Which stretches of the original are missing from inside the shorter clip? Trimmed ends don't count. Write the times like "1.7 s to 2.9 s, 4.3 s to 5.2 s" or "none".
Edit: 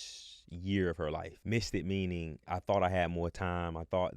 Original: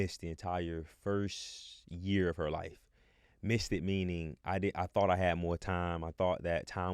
2.7 s to 3.3 s, 4.4 s to 4.7 s